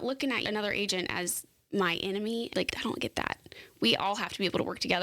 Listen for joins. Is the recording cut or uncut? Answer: cut